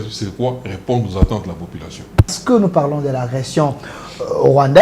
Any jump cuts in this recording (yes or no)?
yes